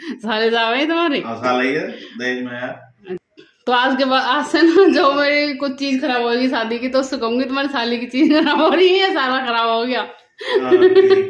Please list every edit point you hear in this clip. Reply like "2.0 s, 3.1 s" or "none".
3.3 s